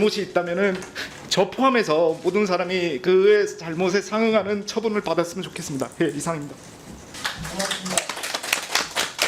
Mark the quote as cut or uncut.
cut